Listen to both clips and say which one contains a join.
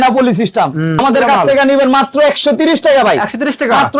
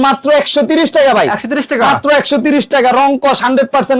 first; 1 cut; at 1.0 s

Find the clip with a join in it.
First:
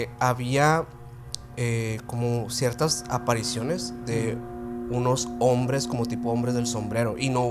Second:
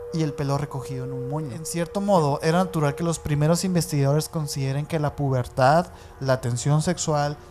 second; 1 cut; at 1.8 s

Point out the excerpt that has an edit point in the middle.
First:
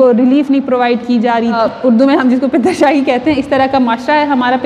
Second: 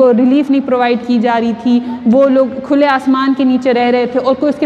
first; 1 cut; at 1.6 s

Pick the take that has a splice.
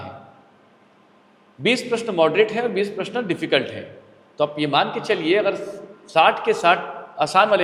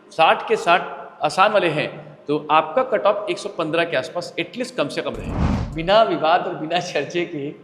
second; 1 cut; at 5.6 s

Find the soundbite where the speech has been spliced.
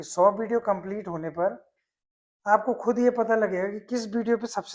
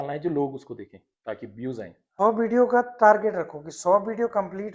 second; 1 cut; at 2.0 s

